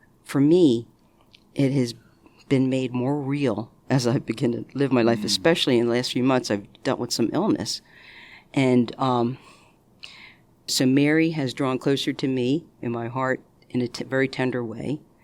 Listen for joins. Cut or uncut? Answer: cut